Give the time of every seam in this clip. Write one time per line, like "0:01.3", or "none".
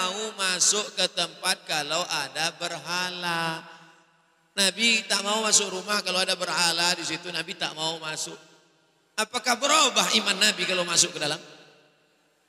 none